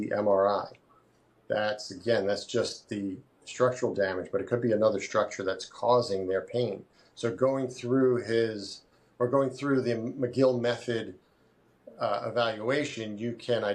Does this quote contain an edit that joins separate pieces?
no; 0 cuts

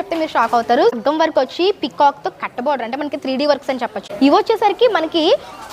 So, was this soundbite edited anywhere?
yes; 2 cuts; at 0.9 s, 4.0 s

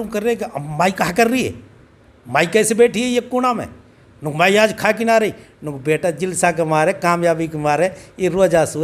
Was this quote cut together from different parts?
no; 0 cuts

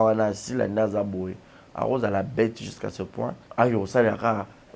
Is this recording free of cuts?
no; 1 cut; at 3.4 s

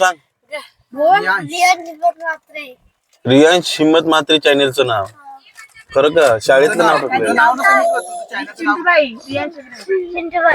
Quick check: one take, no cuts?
yes; 0 cuts

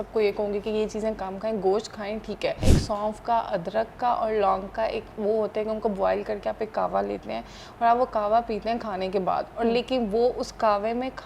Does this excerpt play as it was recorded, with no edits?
no; 1 cut; at 2.6 s

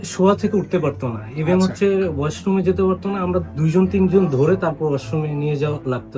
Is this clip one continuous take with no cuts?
yes; 0 cuts

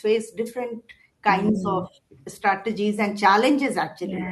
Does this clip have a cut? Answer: no; 0 cuts

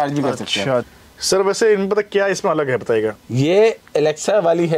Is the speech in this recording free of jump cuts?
no; 1 cut; at 1.0 s

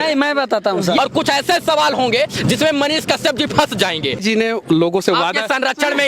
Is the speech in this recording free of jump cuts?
no; 2 cuts; at 1.0 s, 4.2 s

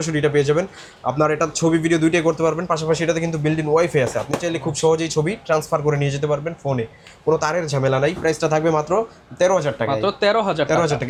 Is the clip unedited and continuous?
yes; 0 cuts

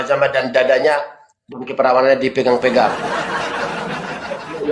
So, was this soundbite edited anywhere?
no; 0 cuts

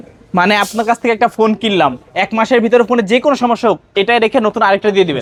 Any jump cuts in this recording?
no; 0 cuts

